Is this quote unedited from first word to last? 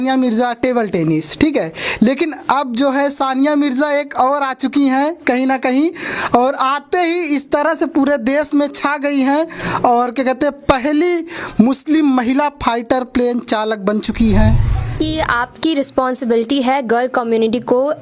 no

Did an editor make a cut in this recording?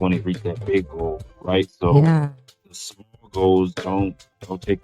yes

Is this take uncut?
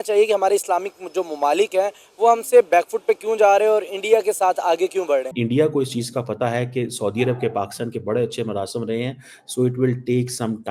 no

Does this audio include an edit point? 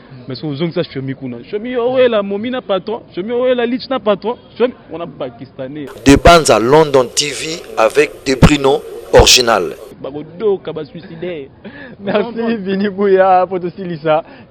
yes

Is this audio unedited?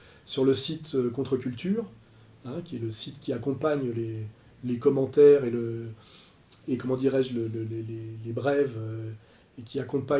no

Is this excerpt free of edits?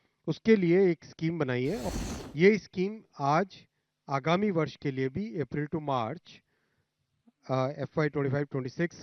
no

